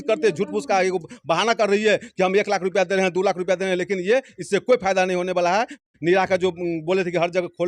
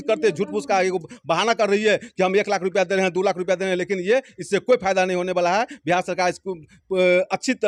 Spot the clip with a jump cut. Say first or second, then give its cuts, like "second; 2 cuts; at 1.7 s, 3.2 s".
first; 1 cut; at 5.9 s